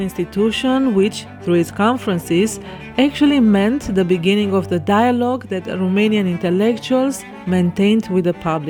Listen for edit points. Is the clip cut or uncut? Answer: uncut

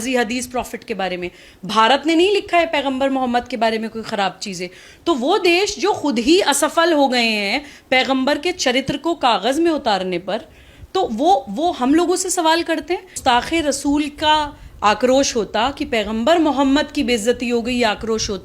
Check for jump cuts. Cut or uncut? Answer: cut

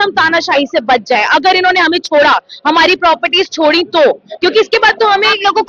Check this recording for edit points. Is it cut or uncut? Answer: uncut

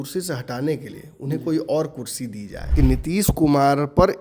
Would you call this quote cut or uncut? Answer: cut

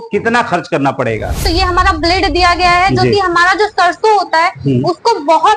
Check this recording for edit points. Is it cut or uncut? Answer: cut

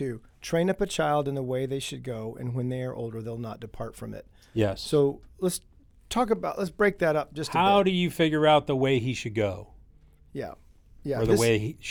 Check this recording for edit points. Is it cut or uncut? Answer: uncut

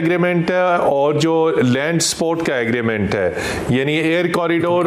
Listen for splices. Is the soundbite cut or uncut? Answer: uncut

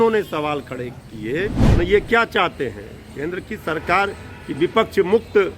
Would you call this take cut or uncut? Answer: cut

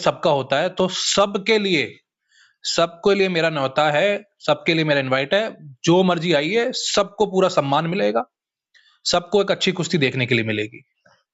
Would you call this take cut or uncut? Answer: uncut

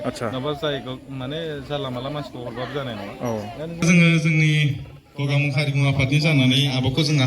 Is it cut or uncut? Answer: cut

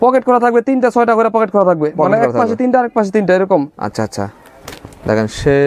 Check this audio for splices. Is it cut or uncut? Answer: uncut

